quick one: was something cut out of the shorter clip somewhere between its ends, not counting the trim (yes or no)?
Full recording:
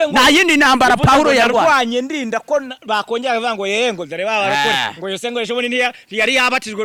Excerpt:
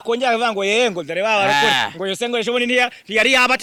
no